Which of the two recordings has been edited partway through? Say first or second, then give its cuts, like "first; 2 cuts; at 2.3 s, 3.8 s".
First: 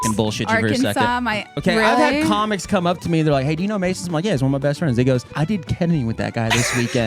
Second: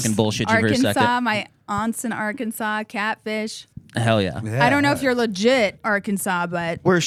first; 2 cuts; at 1.5 s, 5.3 s